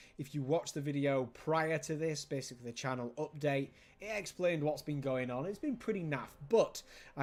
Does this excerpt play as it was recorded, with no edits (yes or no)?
yes